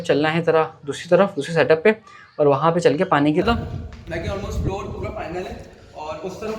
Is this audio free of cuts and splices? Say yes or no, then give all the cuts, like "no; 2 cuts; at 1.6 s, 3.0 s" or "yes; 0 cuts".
no; 1 cut; at 3.4 s